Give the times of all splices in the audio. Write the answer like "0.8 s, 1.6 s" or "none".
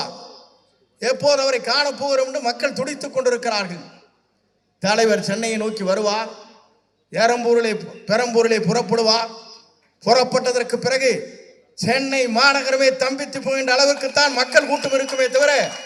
none